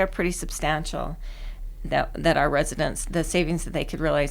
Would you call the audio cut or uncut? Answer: uncut